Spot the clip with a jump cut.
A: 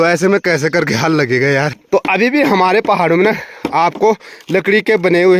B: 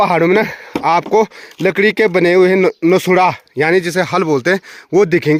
A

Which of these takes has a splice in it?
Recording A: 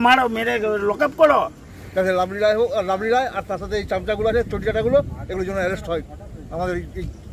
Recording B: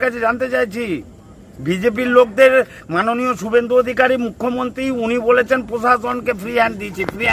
A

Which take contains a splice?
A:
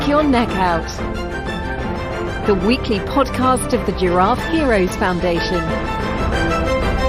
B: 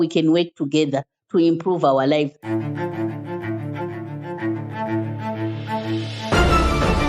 B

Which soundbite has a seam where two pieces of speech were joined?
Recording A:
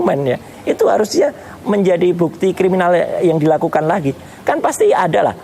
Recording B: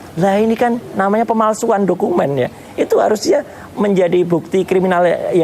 A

